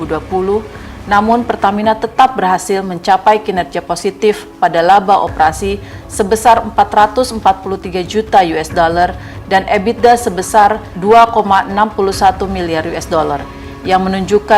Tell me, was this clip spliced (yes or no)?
no